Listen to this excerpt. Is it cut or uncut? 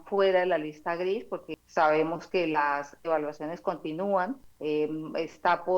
cut